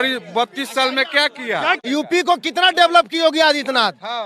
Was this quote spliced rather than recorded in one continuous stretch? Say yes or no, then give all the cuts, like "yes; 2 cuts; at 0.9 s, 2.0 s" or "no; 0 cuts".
yes; 1 cut; at 1.8 s